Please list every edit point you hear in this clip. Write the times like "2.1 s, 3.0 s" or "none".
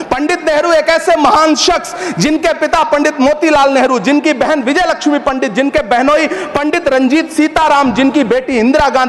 none